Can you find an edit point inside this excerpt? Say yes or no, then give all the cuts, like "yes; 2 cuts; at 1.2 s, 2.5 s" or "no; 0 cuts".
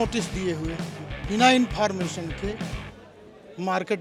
no; 0 cuts